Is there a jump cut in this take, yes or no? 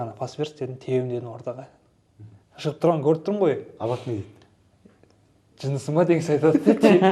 no